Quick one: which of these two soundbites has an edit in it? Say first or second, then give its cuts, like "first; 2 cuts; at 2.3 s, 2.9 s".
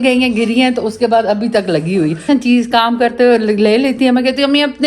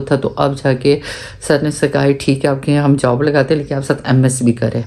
first; 1 cut; at 2.2 s